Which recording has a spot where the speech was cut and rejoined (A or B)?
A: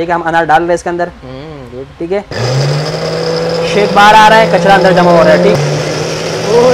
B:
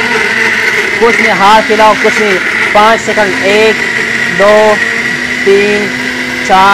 A